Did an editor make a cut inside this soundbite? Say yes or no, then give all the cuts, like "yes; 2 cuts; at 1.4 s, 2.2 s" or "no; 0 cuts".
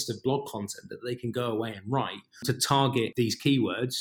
yes; 2 cuts; at 2.4 s, 3.1 s